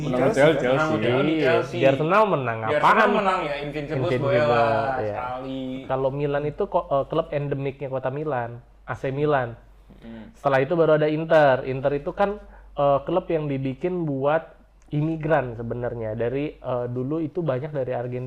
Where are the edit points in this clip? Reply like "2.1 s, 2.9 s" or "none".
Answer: 5.8 s